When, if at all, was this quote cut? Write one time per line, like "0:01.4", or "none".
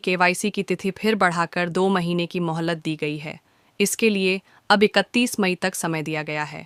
none